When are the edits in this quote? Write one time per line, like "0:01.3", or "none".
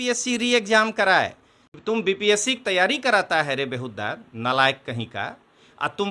0:01.7

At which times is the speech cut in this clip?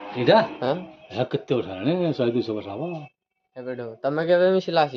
none

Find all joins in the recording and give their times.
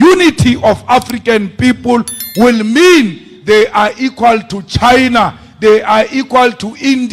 none

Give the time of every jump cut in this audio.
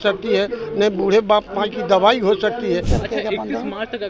0:02.9

